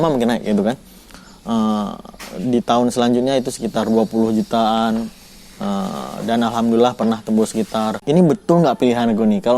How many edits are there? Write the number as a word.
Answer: one